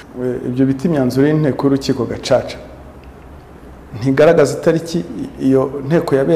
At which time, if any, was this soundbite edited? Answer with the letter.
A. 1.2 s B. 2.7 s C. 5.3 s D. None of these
D